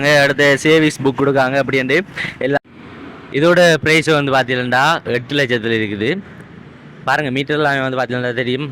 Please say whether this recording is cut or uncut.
cut